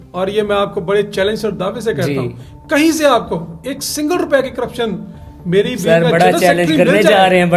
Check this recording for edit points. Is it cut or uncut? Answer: uncut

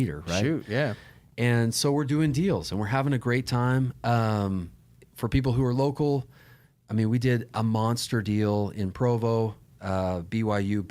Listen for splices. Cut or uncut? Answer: uncut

